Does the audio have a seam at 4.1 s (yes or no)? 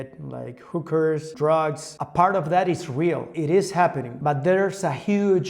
yes